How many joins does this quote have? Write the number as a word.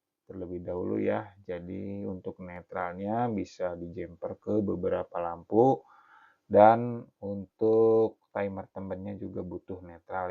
one